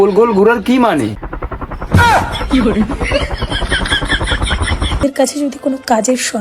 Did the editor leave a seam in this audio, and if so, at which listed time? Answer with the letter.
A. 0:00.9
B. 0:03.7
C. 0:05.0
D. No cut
C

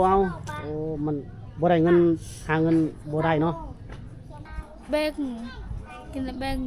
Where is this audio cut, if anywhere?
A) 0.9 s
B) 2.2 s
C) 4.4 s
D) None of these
C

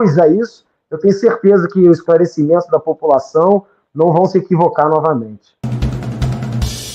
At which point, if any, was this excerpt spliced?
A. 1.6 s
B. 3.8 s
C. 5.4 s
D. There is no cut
C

